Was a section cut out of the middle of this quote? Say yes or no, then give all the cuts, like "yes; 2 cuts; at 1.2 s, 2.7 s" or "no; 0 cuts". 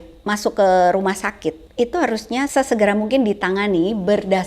yes; 2 cuts; at 1.6 s, 2.5 s